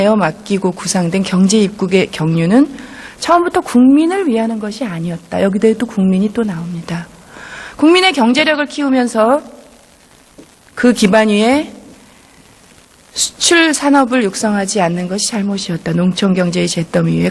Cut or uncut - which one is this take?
uncut